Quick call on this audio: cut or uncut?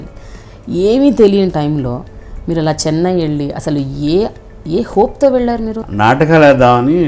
cut